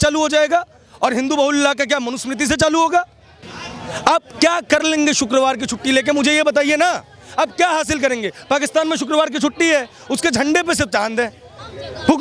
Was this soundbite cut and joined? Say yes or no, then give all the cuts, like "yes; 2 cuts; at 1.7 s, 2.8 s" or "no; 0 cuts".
no; 0 cuts